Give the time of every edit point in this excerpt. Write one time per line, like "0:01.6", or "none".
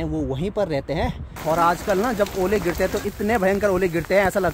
0:01.4